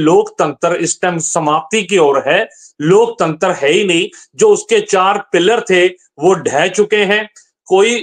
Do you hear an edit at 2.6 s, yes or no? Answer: no